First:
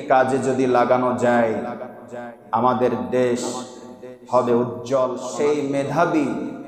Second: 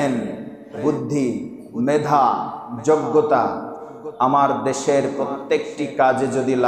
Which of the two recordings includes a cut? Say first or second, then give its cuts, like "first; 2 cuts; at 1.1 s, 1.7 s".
first; 1 cut; at 5.2 s